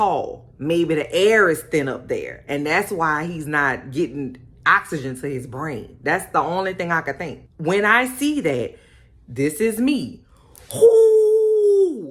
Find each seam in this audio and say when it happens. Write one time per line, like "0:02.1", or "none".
0:07.3